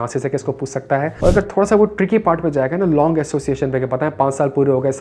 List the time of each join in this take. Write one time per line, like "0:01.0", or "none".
0:01.1